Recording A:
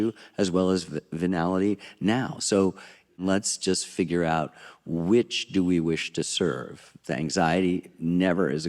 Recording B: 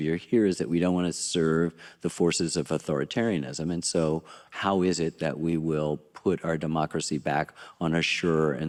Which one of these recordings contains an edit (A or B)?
A